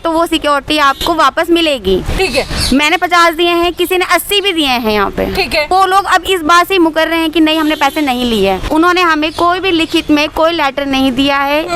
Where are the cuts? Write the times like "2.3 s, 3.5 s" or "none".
5.7 s, 8.7 s